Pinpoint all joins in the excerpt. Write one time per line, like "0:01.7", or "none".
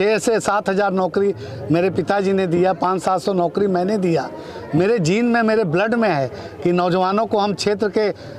none